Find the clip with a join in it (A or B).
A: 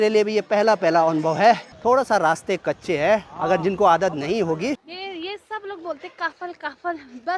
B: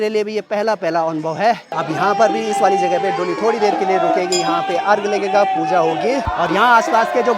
A